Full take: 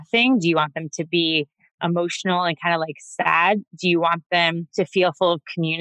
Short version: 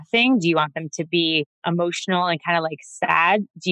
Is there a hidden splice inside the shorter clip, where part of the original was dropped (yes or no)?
yes